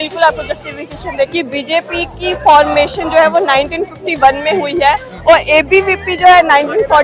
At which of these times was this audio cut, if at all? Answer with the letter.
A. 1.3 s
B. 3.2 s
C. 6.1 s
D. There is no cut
A